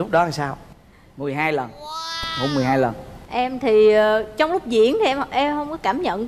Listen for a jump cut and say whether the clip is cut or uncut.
cut